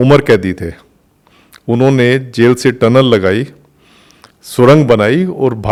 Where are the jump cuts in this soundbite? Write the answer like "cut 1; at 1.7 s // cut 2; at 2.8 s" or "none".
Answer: none